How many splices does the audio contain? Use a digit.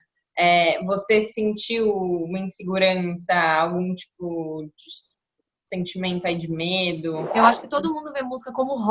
1